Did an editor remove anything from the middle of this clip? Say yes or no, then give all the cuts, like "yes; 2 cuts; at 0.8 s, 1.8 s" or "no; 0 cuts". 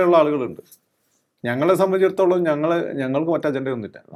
no; 0 cuts